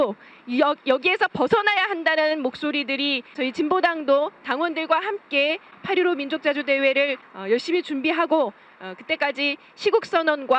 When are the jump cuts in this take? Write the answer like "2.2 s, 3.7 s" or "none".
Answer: 3.3 s, 5.7 s, 7.3 s